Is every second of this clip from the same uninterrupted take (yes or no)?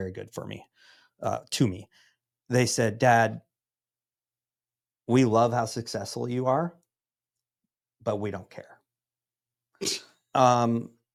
yes